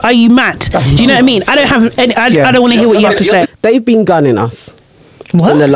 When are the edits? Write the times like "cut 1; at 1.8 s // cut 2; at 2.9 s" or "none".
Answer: cut 1; at 3.4 s